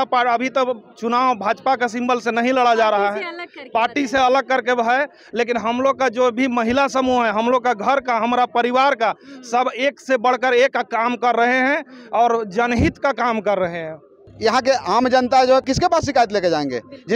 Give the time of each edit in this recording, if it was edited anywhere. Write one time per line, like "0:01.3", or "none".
0:14.3
0:15.6